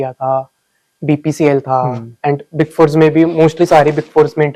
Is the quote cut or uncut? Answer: uncut